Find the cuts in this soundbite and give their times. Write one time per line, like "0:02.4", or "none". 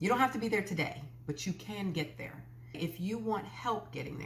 0:02.8